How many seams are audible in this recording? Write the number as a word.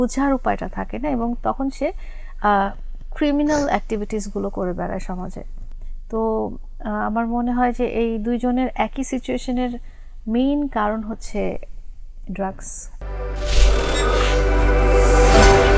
zero